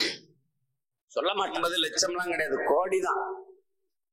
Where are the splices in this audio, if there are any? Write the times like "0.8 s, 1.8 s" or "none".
1.6 s